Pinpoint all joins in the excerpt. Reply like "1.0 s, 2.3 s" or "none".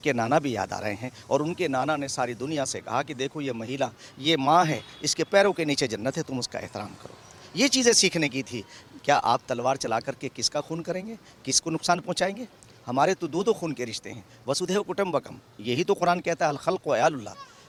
none